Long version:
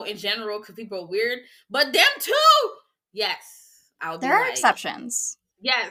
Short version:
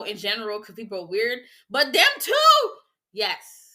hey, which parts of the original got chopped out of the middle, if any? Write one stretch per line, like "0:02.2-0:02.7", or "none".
none

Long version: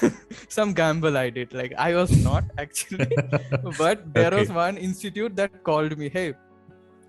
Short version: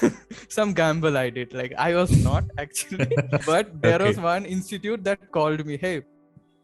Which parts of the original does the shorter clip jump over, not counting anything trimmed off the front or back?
0:03.4-0:03.7

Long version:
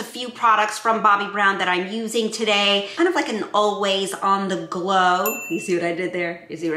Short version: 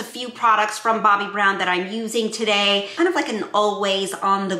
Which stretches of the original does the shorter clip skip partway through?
none

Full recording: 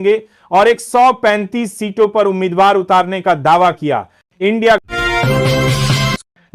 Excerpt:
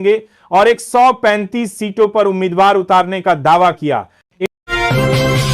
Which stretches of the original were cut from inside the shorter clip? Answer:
0:04.5-0:04.8

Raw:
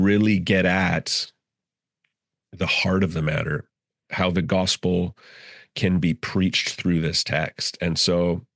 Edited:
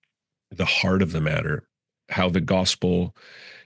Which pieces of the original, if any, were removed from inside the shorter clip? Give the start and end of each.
none

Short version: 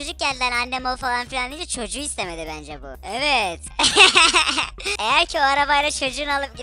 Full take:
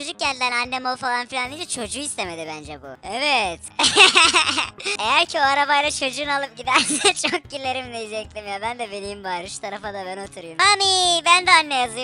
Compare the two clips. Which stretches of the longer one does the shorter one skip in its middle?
none

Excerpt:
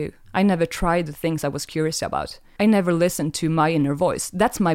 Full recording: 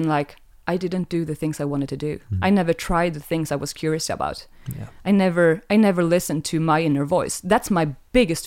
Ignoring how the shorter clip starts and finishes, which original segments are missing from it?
0:04.6-0:05.6

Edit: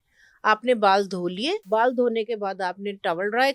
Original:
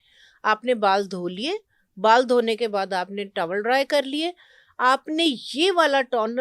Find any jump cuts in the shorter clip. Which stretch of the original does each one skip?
0:01.6-0:01.9

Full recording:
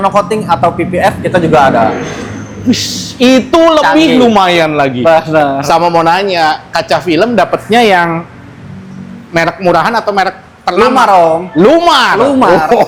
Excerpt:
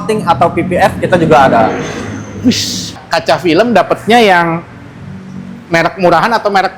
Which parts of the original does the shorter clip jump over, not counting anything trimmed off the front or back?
0:03.2-0:06.6

